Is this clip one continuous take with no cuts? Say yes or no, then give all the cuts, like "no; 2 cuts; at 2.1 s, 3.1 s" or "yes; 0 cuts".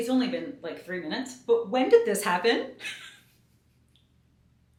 yes; 0 cuts